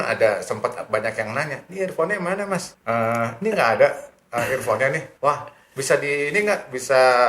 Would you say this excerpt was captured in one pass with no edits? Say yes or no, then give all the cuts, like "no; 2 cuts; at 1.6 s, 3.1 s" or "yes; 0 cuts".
no; 2 cuts; at 2.7 s, 5.1 s